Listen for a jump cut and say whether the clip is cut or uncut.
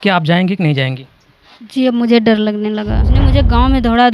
cut